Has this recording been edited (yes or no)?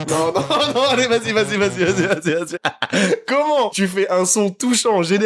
yes